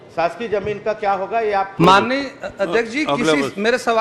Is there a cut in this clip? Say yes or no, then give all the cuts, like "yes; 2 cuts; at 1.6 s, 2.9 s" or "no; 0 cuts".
yes; 1 cut; at 1.8 s